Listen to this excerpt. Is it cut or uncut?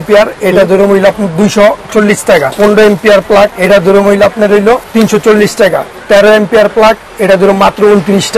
cut